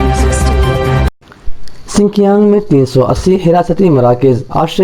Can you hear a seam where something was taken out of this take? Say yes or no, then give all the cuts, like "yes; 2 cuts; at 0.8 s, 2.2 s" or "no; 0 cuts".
yes; 1 cut; at 1.2 s